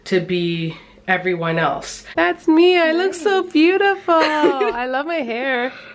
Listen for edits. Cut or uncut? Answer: cut